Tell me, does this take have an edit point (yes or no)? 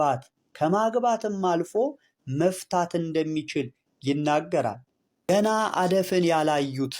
yes